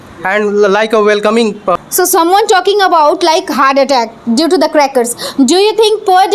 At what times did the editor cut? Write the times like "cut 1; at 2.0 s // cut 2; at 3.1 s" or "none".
cut 1; at 1.8 s